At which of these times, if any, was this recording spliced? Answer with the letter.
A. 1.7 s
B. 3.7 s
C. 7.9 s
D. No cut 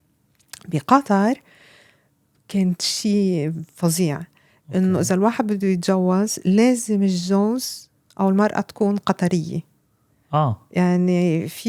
D